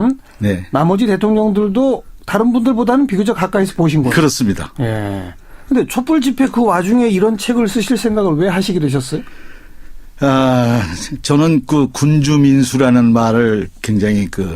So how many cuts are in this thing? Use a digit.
1